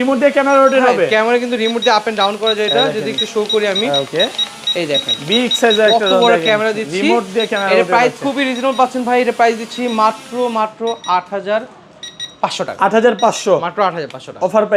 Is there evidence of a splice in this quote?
no; 0 cuts

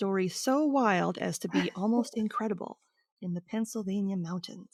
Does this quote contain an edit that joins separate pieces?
no; 0 cuts

